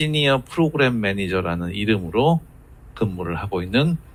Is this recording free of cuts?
yes; 0 cuts

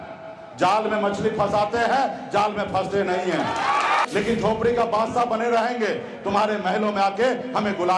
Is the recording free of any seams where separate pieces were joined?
no; 1 cut; at 4.1 s

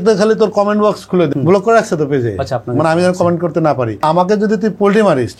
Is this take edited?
yes; 2 cuts; at 1.3 s, 4.0 s

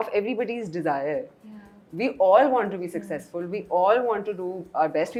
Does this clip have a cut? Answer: no; 0 cuts

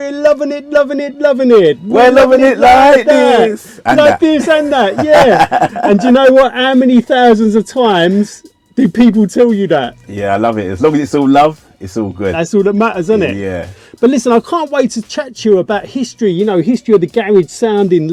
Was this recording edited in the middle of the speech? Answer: no; 0 cuts

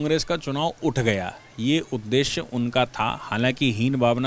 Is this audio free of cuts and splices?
yes; 0 cuts

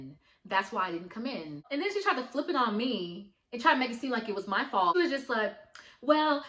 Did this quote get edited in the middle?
yes; 1 cut; at 4.9 s

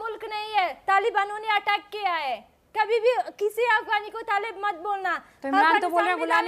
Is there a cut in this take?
no; 0 cuts

